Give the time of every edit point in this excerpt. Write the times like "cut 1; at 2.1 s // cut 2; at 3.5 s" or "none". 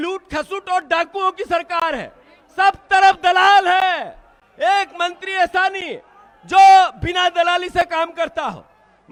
none